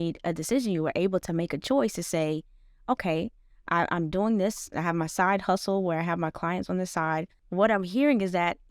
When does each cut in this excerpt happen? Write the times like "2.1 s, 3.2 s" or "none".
7.4 s